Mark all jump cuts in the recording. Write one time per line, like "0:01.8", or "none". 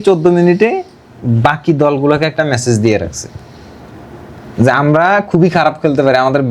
none

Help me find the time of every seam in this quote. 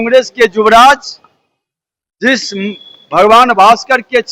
none

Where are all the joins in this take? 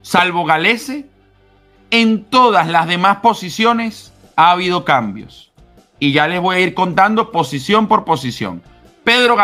none

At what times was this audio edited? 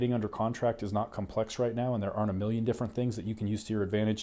none

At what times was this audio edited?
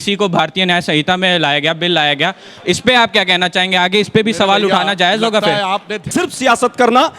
0:06.0

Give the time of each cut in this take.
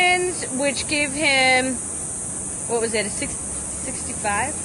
none

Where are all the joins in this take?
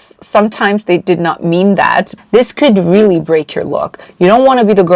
0:02.1

